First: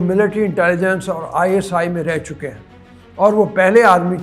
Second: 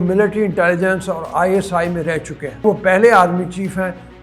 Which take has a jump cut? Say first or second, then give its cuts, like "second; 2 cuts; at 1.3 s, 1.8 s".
second; 1 cut; at 2.6 s